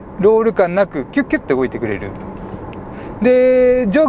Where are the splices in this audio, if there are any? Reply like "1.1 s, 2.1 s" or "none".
none